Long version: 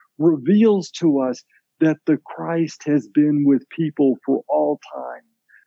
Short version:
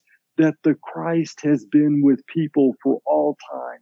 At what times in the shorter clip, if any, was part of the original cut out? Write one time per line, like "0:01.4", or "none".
none